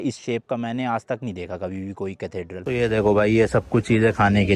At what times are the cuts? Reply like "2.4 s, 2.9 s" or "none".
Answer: 2.7 s